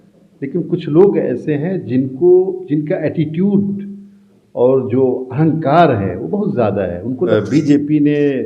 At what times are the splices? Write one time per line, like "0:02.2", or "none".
0:07.3